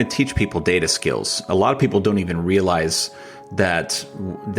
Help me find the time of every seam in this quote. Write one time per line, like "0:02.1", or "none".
none